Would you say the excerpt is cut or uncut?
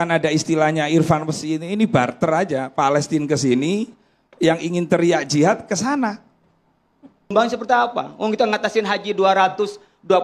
cut